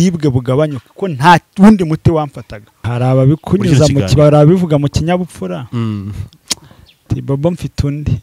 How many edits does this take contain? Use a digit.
1